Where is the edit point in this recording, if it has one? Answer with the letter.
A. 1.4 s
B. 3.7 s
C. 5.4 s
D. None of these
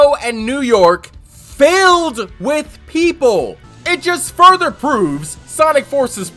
B